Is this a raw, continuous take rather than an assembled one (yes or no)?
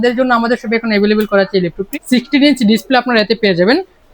no